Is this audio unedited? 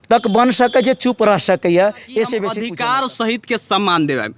no; 1 cut; at 2.6 s

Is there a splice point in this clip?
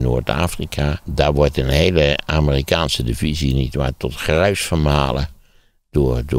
yes; 1 cut; at 1.0 s

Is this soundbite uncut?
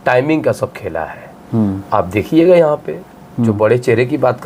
yes; 0 cuts

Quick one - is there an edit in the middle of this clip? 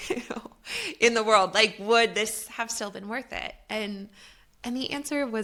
no; 0 cuts

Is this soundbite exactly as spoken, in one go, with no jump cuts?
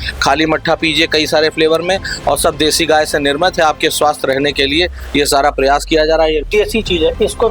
no; 1 cut; at 6.5 s

